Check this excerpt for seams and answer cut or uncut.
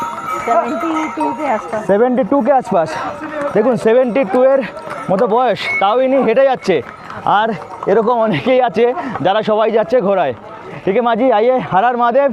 uncut